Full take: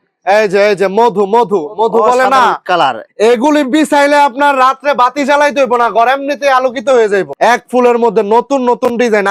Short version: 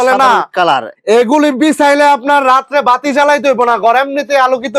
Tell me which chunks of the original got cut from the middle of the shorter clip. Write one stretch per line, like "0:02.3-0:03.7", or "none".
none

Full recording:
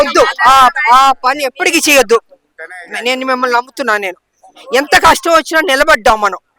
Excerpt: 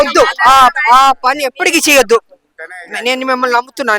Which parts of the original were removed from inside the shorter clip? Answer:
none

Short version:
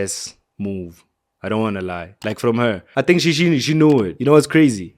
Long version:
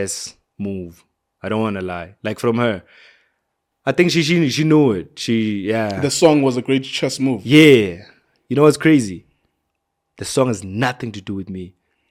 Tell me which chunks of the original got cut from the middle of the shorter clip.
0:02.8-0:03.7
0:05.0-0:08.4

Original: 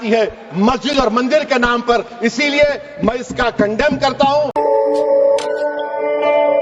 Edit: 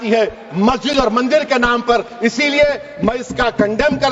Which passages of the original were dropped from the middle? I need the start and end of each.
none

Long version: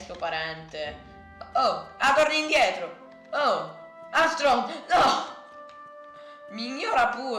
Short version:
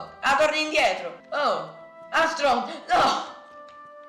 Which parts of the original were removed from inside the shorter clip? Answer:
0:02.9-0:03.2

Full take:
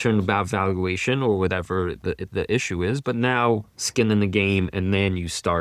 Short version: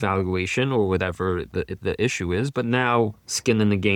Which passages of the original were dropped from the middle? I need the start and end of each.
none

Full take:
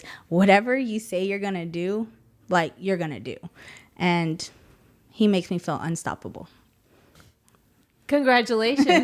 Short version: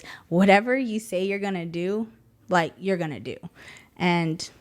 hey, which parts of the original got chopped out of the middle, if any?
none

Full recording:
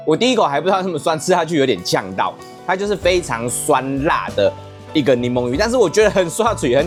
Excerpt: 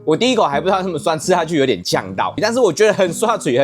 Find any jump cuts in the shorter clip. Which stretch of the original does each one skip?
0:02.4-0:05.5

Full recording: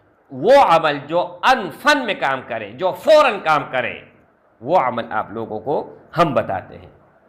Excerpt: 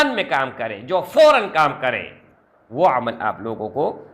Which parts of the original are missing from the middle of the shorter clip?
none

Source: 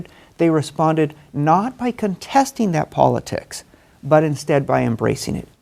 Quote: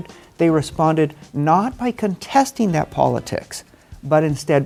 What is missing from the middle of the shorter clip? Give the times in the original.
none

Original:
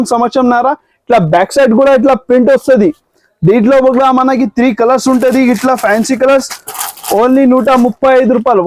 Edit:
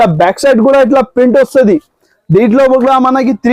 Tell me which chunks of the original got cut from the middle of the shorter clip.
none

